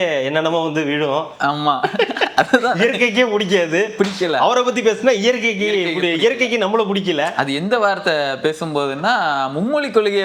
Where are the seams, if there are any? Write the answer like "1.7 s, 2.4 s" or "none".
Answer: none